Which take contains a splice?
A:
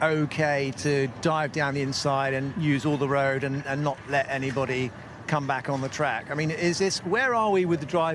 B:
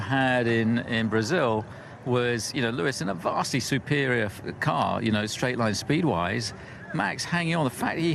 B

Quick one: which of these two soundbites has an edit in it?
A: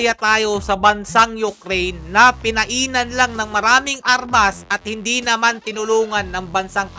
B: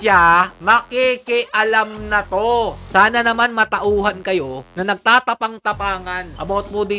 B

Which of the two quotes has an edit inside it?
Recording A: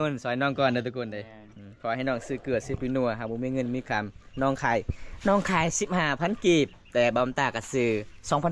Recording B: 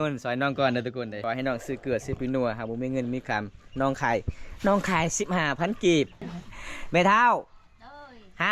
B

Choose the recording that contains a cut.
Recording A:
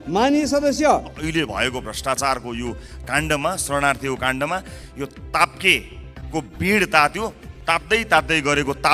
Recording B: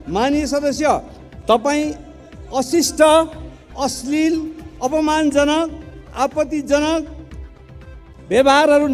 A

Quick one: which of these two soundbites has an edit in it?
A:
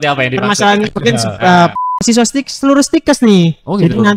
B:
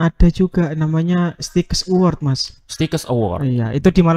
A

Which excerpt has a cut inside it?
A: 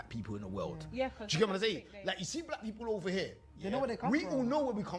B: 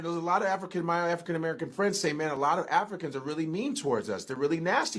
A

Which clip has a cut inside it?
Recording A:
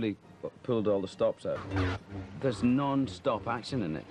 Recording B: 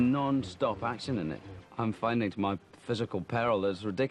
A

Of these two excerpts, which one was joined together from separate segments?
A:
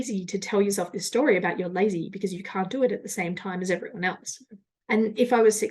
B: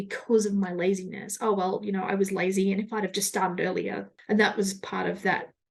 A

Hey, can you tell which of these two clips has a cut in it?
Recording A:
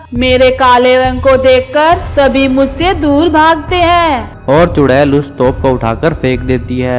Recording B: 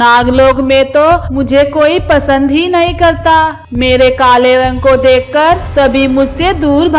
A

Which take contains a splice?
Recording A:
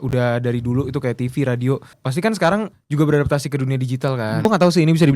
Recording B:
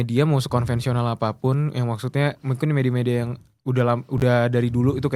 A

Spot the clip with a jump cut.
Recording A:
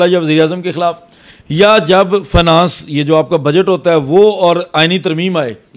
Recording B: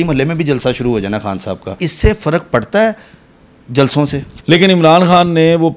B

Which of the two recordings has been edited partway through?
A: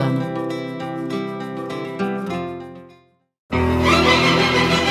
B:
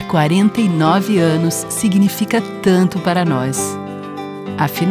A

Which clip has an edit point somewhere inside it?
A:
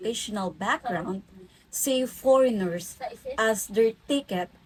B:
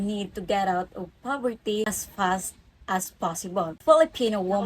B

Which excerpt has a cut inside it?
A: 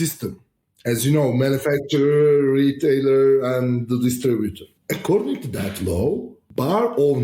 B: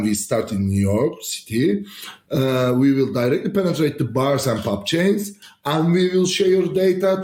A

